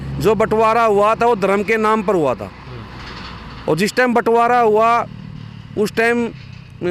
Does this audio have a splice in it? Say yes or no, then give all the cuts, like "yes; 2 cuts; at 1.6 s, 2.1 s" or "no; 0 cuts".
no; 0 cuts